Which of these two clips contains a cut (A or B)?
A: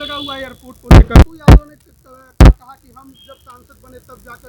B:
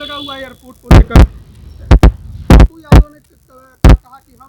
A